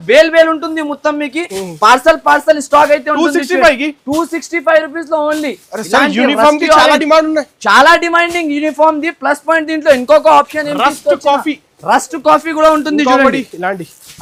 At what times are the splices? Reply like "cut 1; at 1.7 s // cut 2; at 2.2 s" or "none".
none